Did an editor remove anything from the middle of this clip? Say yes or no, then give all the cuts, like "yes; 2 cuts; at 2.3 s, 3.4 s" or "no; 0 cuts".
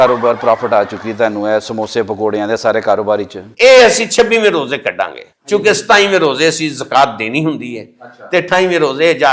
no; 0 cuts